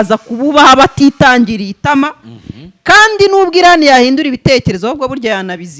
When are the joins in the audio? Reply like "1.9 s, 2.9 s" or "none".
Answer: none